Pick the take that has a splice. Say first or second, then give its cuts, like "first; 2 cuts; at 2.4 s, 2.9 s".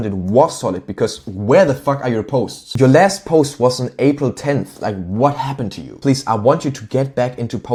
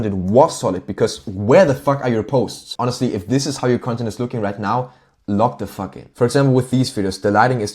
second; 2 cuts; at 2.6 s, 6.1 s